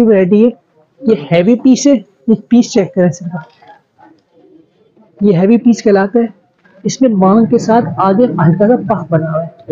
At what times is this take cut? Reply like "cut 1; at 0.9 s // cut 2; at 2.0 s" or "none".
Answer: none